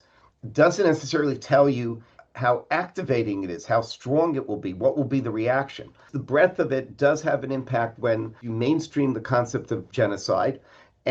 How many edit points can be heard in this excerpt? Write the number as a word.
three